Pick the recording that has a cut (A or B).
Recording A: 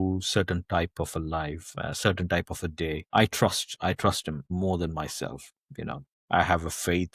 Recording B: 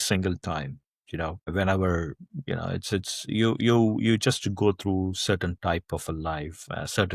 A